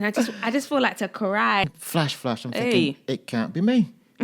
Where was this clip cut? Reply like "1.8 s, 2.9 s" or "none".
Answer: 1.7 s

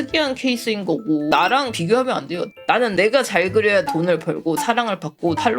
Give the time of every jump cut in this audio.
2.5 s

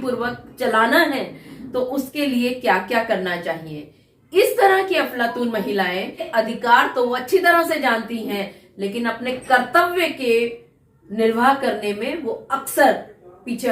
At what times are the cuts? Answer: 6.2 s

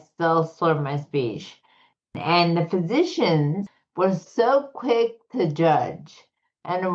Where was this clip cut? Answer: 2.1 s, 3.6 s

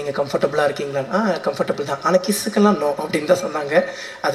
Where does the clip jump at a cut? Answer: none

